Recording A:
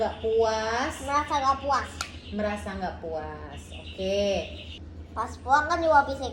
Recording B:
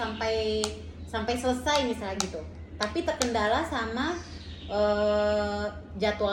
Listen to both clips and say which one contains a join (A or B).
A